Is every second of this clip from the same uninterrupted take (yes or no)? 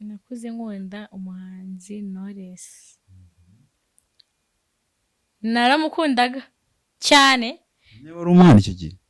yes